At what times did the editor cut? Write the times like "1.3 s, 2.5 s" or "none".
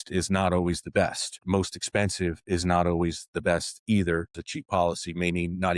1.4 s, 4.4 s